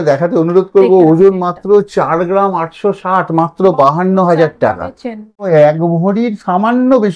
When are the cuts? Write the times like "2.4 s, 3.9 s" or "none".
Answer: 5.4 s